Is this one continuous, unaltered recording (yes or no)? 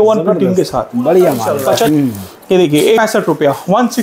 no